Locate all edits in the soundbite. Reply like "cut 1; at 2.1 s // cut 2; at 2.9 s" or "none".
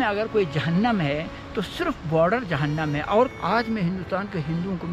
cut 1; at 3.3 s